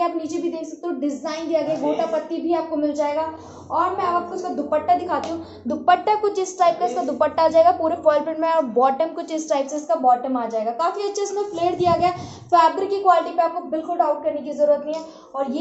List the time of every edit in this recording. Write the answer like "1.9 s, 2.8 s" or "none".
none